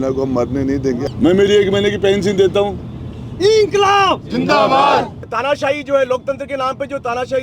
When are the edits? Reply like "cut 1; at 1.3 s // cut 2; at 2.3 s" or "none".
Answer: cut 1; at 1.1 s // cut 2; at 5.3 s